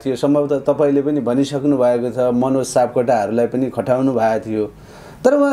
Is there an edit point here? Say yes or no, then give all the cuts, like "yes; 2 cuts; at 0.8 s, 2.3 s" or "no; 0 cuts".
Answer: no; 0 cuts